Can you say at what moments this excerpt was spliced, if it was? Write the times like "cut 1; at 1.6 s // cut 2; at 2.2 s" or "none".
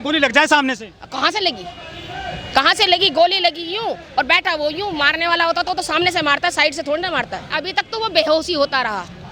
cut 1; at 7.5 s